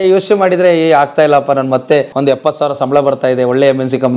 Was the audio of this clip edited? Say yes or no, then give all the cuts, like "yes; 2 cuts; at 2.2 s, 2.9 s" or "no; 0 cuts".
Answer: yes; 1 cut; at 2.1 s